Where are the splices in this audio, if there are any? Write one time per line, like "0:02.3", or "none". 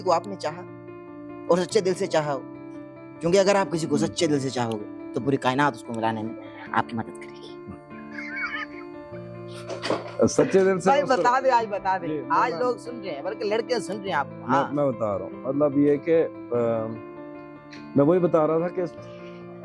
none